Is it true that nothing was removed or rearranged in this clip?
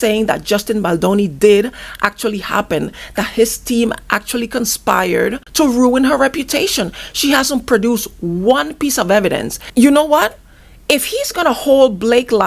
no; 2 cuts; at 5.4 s, 9.6 s

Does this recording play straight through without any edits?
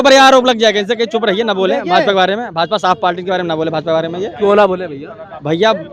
yes; 0 cuts

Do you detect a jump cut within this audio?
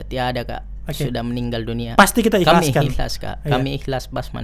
no; 0 cuts

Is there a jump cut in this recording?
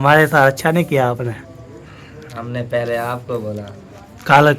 no; 0 cuts

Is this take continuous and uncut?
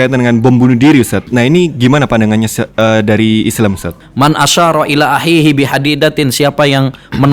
no; 2 cuts; at 1.2 s, 4.0 s

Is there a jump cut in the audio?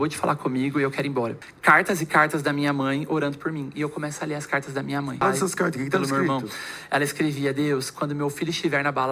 yes; 2 cuts; at 1.5 s, 5.2 s

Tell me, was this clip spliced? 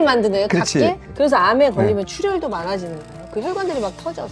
yes; 1 cut; at 1.0 s

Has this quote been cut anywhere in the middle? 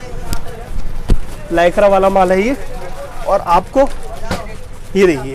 no; 0 cuts

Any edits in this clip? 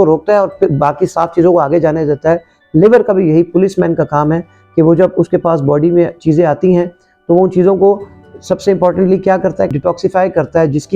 no; 0 cuts

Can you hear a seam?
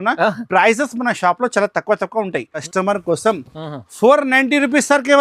yes; 1 cut; at 2.7 s

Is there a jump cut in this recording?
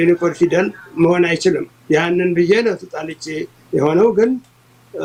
no; 0 cuts

